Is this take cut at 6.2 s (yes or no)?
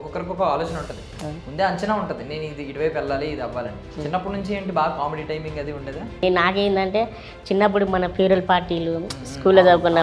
yes